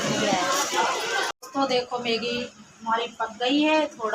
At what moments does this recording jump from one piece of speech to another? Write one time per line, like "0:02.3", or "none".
0:01.3